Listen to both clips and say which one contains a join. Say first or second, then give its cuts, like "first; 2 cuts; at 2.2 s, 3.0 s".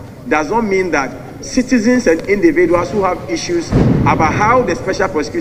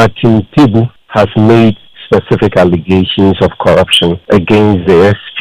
second; 2 cuts; at 1.0 s, 4.2 s